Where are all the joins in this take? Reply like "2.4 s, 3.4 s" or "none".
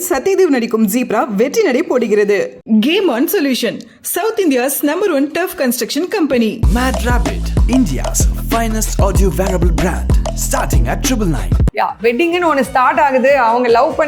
11.7 s